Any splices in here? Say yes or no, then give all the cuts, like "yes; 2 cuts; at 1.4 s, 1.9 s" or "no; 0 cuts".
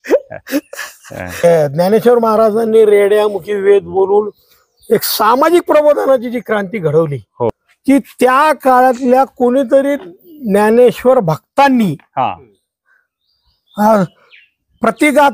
yes; 2 cuts; at 1.4 s, 7.5 s